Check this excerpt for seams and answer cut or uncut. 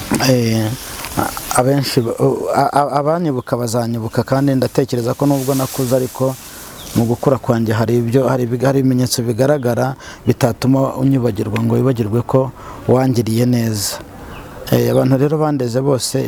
uncut